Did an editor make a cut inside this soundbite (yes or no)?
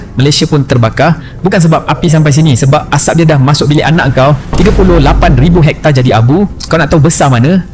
no